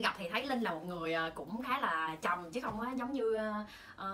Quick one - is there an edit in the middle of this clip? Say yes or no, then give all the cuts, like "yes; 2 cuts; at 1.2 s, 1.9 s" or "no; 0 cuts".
no; 0 cuts